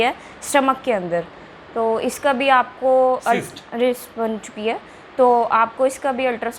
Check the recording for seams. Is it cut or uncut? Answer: uncut